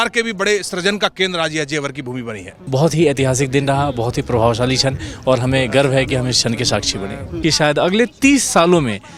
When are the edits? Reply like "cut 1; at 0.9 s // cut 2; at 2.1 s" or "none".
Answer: cut 1; at 2.5 s // cut 2; at 7.3 s

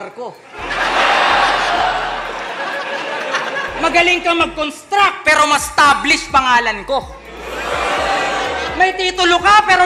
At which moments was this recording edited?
none

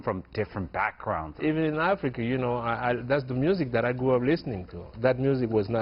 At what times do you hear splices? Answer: cut 1; at 1.4 s // cut 2; at 4.9 s

